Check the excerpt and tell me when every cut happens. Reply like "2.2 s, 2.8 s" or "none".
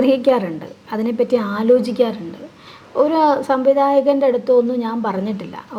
none